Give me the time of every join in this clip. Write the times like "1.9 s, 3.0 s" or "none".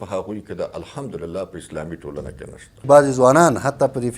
2.8 s